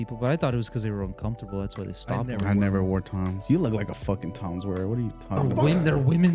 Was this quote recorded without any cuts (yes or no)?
yes